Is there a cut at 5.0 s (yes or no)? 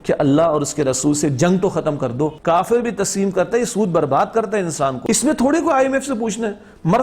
yes